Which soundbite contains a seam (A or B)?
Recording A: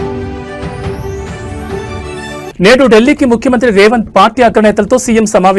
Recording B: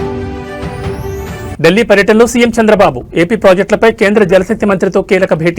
B